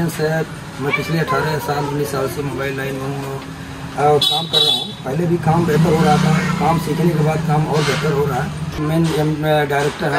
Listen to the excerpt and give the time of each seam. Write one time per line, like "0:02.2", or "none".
0:08.8